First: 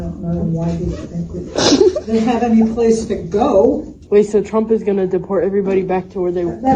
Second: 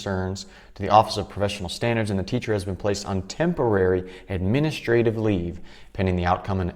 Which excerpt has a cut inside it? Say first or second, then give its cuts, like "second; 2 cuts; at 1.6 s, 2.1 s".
first; 1 cut; at 3.9 s